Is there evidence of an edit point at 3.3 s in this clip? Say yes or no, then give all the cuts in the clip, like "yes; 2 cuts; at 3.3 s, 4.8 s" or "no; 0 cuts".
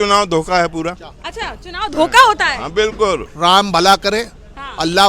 yes; 1 cut; at 3.3 s